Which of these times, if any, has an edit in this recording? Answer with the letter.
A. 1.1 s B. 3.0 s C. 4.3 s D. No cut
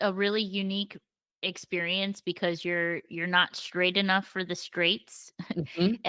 D